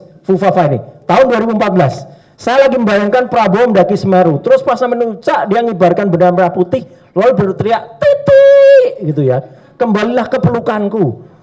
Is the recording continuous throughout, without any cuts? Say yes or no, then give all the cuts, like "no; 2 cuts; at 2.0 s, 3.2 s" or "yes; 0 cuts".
yes; 0 cuts